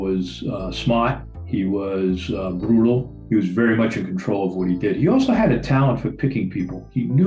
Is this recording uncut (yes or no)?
yes